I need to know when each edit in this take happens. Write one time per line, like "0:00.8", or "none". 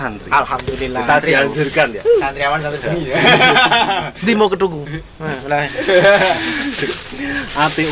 none